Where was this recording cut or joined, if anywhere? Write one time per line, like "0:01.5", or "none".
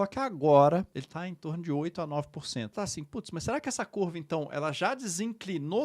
0:01.0
0:02.7